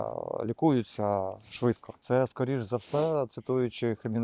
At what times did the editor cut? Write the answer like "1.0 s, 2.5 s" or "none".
1.9 s